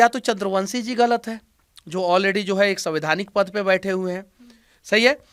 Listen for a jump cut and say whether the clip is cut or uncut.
uncut